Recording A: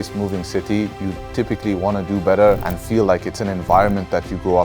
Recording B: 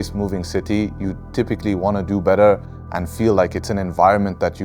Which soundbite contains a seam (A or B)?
A